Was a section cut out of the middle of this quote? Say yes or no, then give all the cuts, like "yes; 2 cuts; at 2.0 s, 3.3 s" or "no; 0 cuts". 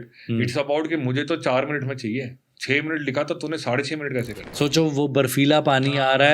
yes; 1 cut; at 4.4 s